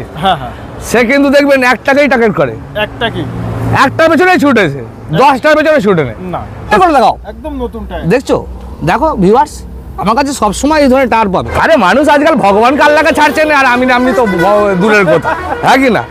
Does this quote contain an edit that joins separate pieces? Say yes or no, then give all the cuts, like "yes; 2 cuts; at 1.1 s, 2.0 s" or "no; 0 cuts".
yes; 2 cuts; at 6.7 s, 11.5 s